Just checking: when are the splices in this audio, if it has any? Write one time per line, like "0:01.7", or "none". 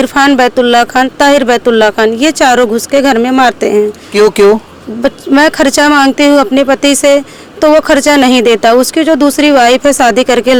none

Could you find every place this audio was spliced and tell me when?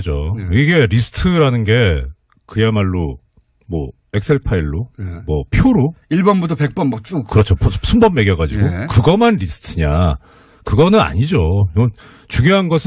none

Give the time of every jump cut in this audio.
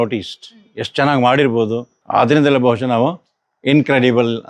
0:01.9

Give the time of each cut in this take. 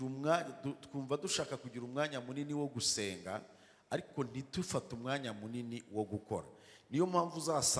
none

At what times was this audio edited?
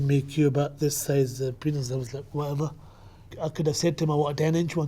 0:03.3

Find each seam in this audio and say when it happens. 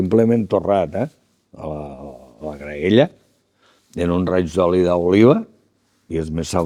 none

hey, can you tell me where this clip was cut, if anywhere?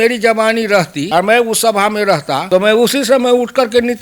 0:01.0
0:02.4

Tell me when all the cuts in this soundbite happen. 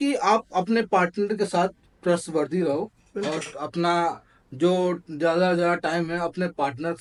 none

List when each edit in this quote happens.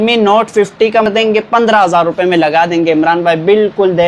0:01.1

